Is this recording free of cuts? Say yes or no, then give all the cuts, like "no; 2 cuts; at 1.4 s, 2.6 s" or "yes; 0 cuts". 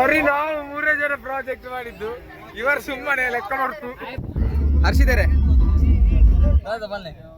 no; 1 cut; at 4.1 s